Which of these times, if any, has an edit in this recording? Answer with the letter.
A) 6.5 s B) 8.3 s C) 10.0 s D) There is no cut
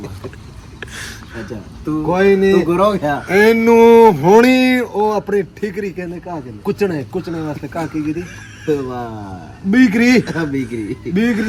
D